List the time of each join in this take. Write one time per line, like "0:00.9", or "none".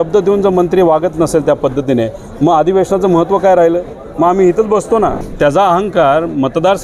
0:05.2